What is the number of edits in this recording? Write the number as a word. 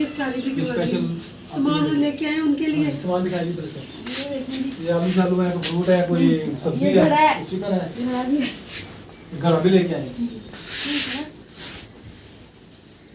zero